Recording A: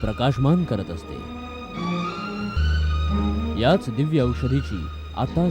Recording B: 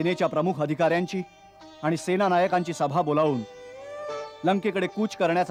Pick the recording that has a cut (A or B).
A